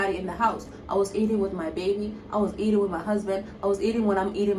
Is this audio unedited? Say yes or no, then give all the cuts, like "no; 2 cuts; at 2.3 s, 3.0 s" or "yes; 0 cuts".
yes; 0 cuts